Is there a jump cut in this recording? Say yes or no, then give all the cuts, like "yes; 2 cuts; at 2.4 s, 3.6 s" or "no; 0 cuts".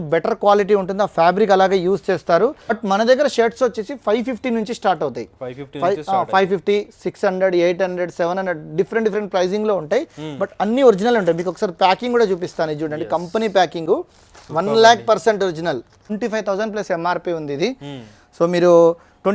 yes; 2 cuts; at 2.8 s, 16.1 s